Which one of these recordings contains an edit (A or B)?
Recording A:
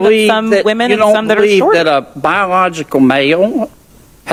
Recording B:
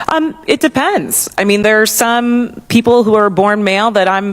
B